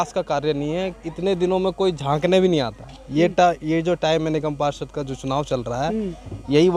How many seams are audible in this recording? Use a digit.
0